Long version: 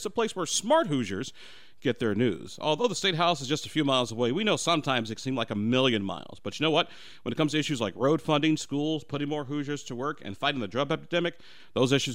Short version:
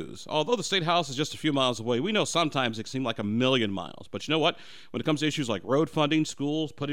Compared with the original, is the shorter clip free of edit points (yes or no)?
yes